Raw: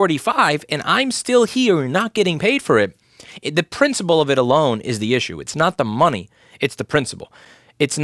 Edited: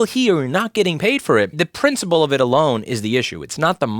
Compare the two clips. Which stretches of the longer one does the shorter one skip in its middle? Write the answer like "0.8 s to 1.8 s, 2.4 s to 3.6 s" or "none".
2.9 s to 3.5 s